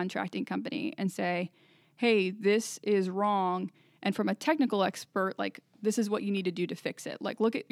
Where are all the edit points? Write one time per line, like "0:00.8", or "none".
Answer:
none